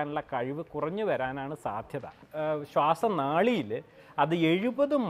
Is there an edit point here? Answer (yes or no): yes